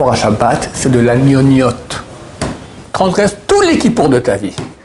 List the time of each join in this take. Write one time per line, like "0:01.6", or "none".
0:02.8